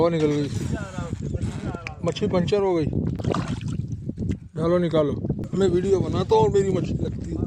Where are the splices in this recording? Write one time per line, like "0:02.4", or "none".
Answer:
0:03.2
0:05.4